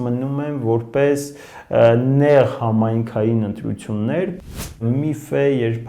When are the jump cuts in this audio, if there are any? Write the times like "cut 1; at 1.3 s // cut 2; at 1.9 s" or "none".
cut 1; at 4.4 s